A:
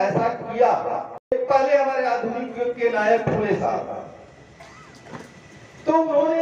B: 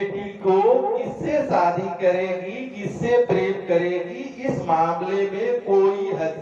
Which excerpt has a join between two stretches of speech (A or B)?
A